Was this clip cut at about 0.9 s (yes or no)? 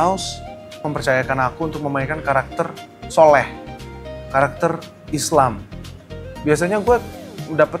yes